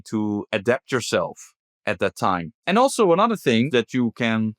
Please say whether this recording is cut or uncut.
cut